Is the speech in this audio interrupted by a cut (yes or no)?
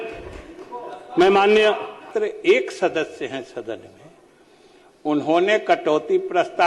yes